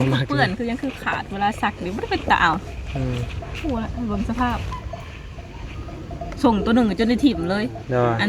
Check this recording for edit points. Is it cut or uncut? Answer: uncut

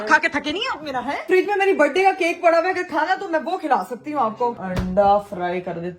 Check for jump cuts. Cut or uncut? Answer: cut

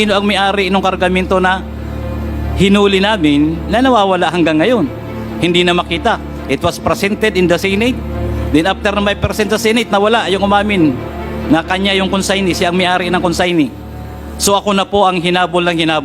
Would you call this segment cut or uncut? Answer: uncut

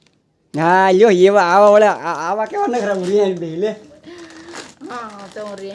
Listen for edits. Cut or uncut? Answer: uncut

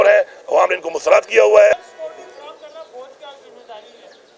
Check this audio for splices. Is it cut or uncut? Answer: cut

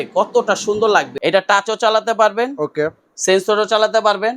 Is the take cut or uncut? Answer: cut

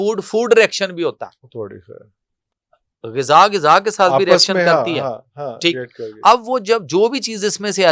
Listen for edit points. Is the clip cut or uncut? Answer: uncut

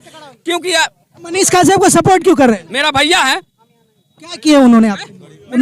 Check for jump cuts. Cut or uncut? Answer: uncut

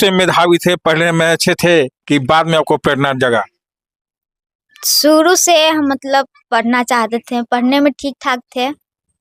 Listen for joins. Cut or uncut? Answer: uncut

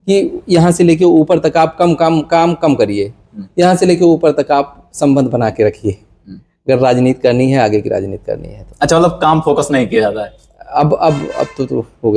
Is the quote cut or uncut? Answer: uncut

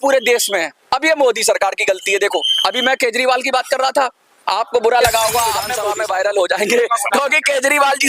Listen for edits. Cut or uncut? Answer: cut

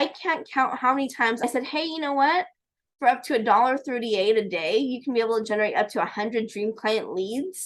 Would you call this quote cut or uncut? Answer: cut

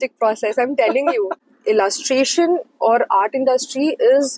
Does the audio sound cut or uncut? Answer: cut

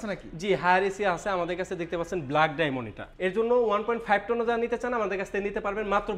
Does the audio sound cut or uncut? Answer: cut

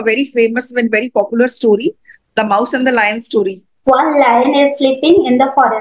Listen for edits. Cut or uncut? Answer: cut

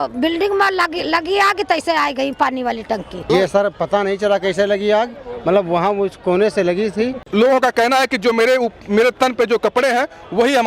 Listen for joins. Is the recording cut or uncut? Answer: cut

